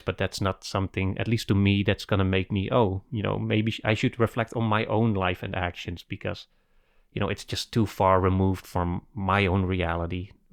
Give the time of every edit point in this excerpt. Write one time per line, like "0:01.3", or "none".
none